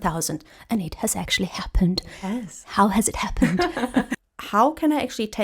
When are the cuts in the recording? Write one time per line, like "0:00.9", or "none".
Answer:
0:04.2